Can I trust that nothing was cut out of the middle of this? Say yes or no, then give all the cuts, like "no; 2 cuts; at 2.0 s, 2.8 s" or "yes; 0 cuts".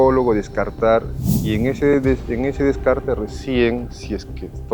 no; 1 cut; at 1.2 s